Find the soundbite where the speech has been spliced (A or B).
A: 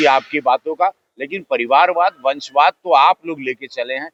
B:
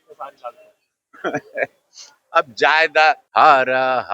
B